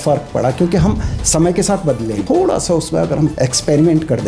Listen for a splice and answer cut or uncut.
cut